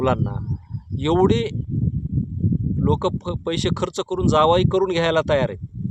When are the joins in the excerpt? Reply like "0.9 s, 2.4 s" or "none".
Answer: none